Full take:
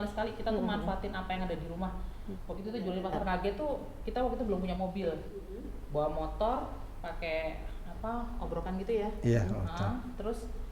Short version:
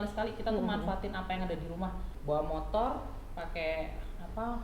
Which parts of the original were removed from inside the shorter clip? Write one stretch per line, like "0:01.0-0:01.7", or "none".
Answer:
0:02.1-0:05.7